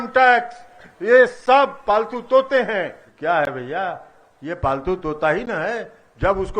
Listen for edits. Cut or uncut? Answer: cut